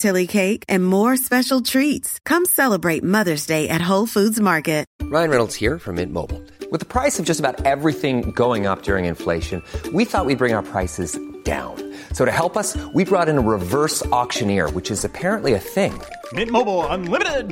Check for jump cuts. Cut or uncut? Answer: cut